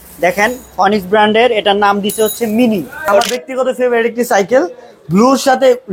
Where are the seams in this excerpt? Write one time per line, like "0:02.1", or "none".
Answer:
0:03.3

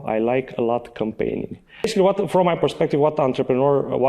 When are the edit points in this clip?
0:01.9

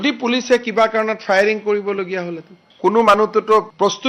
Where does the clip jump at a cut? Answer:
0:02.7

